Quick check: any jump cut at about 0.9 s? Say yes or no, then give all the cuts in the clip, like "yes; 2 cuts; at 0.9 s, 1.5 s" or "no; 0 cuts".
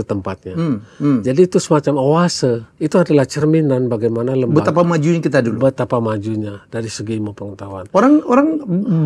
no; 1 cut; at 2.7 s